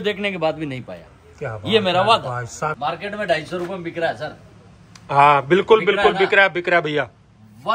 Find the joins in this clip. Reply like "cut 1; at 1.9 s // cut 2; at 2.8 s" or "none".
cut 1; at 2.6 s